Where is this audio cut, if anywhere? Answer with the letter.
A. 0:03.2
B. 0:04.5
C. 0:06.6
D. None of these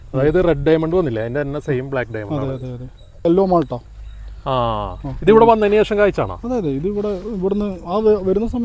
A